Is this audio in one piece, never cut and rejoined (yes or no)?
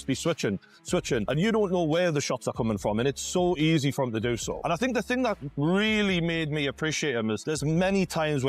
yes